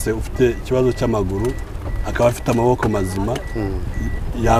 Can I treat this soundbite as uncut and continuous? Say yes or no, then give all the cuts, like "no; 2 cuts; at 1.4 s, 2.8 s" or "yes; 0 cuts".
yes; 0 cuts